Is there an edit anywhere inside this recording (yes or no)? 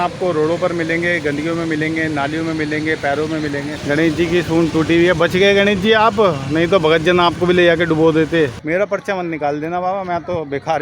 yes